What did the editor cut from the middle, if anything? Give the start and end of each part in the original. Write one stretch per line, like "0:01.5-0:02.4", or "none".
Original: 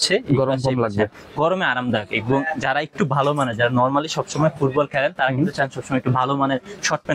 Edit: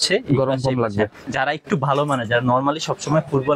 0:01.2-0:02.5

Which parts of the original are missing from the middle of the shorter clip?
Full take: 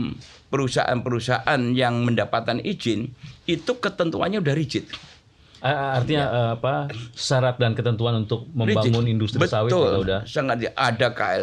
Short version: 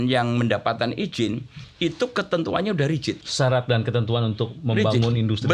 0:04.9-0:07.2

